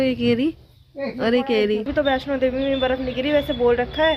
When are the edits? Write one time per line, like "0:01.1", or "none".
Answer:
0:01.9